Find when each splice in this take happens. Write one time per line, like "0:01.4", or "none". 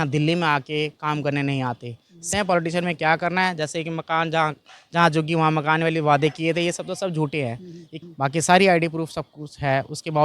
0:02.3
0:07.9